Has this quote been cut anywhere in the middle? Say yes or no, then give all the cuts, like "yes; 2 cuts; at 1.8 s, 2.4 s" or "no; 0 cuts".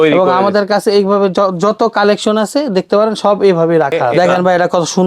yes; 1 cut; at 4.1 s